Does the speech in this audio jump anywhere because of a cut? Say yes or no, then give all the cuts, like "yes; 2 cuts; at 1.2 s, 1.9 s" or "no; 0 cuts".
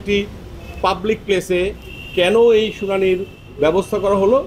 no; 0 cuts